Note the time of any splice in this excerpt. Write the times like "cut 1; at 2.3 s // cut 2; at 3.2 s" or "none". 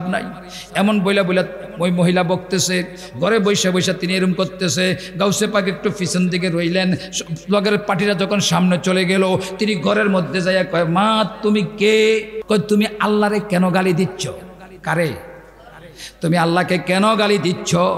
cut 1; at 12.4 s